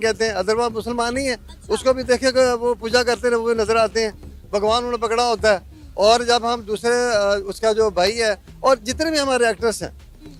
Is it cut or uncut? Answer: uncut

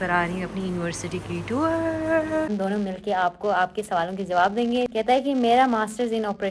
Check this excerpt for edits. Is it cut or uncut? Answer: cut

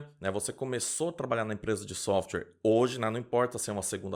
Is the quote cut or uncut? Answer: uncut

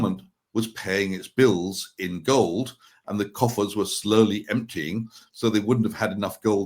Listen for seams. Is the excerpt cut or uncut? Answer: uncut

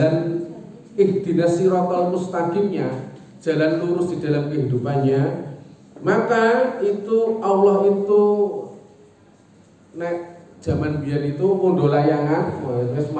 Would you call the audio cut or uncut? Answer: uncut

